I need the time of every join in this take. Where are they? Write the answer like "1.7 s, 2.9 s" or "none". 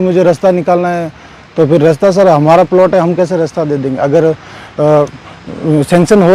none

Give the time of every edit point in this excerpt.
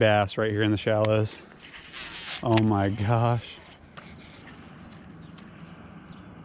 4.0 s

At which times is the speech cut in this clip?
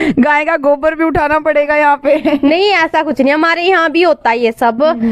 none

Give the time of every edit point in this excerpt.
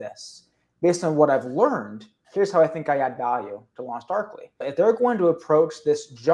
4.6 s

